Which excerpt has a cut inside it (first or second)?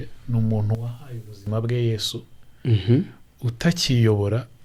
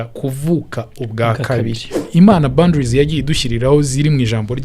second